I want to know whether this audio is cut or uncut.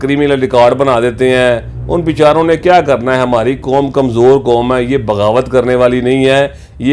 uncut